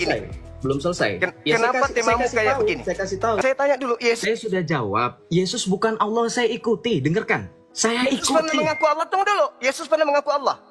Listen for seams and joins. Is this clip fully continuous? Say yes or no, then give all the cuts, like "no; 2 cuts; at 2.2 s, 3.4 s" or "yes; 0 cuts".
no; 1 cut; at 3.4 s